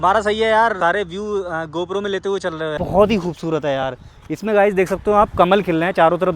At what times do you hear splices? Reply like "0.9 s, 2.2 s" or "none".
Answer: 0.8 s, 2.8 s